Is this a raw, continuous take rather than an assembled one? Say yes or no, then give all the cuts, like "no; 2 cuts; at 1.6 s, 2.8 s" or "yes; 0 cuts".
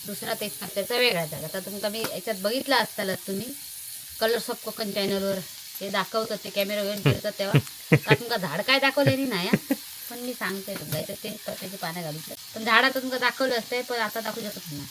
no; 1 cut; at 12.3 s